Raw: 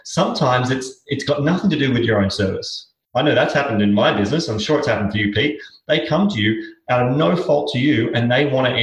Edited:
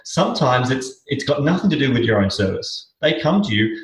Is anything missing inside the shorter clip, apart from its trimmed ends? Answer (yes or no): yes